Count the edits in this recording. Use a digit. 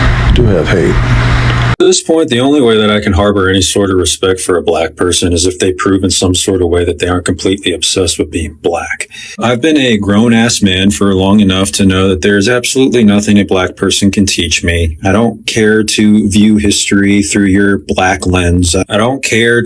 1